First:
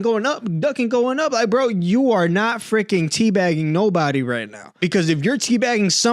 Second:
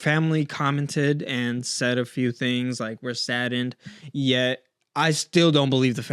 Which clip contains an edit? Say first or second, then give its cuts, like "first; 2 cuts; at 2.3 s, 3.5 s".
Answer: first; 1 cut; at 4.8 s